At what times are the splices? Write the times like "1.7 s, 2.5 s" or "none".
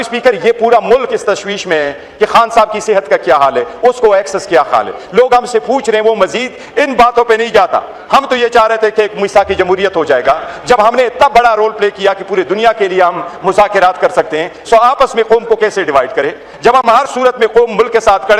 none